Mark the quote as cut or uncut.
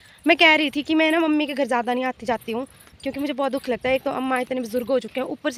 uncut